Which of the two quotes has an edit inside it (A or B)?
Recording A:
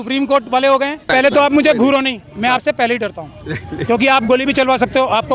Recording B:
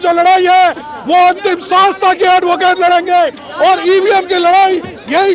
A